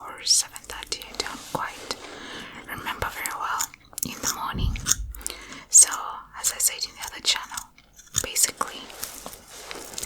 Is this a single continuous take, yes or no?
yes